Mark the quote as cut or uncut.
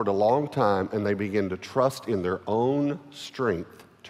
uncut